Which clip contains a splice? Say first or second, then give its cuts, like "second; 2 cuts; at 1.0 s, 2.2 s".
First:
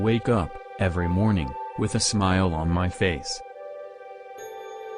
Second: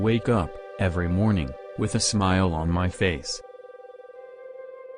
second; 1 cut; at 3.2 s